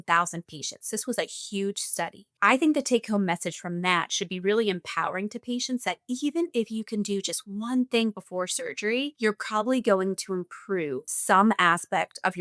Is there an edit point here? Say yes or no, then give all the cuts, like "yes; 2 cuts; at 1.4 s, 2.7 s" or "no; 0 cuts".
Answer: yes; 3 cuts; at 2.2 s, 9.1 s, 11.1 s